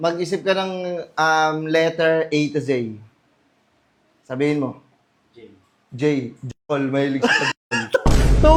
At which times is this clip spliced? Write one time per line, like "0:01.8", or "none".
none